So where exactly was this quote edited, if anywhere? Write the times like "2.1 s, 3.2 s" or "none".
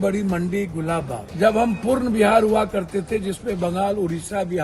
1.2 s